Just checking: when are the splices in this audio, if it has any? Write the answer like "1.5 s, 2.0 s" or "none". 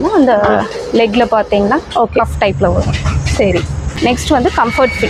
4.0 s